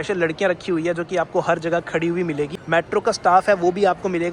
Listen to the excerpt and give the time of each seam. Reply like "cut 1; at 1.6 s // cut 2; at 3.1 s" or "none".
cut 1; at 2.6 s